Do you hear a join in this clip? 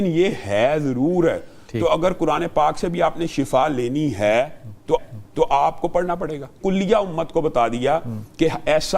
yes; 1 cut; at 6.5 s

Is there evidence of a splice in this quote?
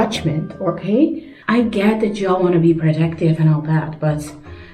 yes; 1 cut; at 1.3 s

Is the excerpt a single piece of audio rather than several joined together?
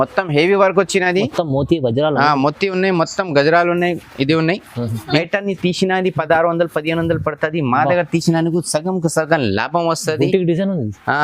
no; 1 cut; at 5.2 s

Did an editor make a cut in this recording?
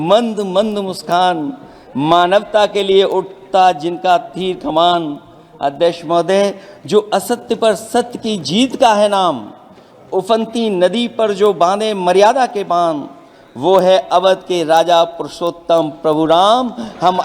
no; 0 cuts

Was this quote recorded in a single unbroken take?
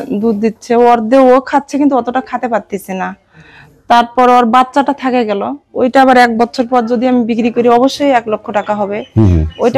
yes; 0 cuts

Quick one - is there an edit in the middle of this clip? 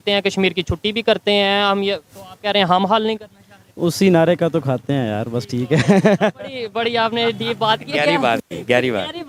no; 0 cuts

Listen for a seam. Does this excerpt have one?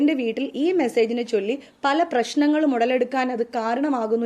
no; 0 cuts

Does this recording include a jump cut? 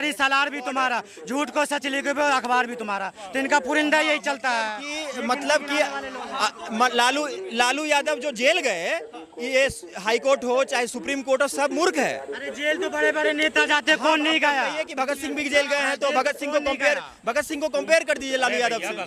no; 0 cuts

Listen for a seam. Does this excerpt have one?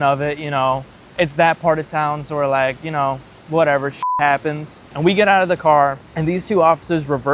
no; 0 cuts

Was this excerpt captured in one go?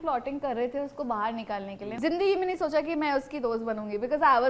no; 1 cut; at 1.9 s

